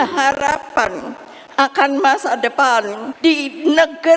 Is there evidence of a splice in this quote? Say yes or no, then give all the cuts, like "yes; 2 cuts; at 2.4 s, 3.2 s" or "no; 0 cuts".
yes; 1 cut; at 3.0 s